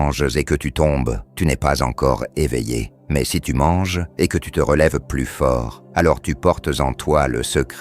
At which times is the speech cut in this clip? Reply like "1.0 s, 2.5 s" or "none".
1.2 s, 3.0 s, 4.0 s, 5.8 s